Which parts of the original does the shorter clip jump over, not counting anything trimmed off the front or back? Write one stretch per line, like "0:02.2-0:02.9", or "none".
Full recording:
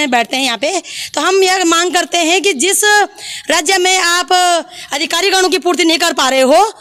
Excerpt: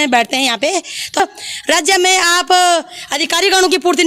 0:01.2-0:03.0